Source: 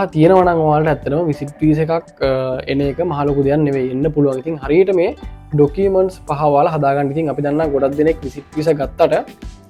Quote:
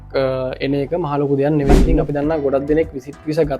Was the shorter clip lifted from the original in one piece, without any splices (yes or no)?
no